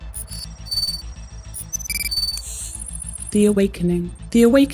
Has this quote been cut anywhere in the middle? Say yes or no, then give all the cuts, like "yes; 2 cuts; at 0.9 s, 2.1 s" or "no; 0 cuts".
no; 0 cuts